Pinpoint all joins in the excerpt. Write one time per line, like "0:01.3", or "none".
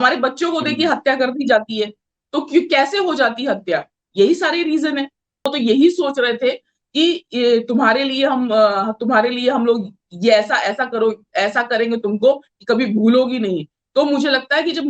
0:05.5